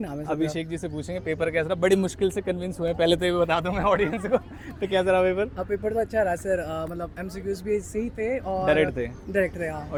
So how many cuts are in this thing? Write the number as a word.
zero